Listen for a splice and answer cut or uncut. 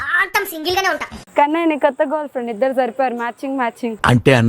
cut